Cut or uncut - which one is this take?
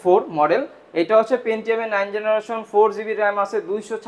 uncut